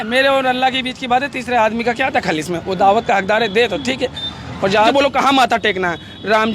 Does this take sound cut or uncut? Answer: cut